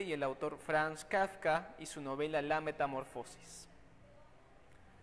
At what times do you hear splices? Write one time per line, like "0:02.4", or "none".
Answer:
none